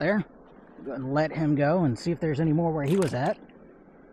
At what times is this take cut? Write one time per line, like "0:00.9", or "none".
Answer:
none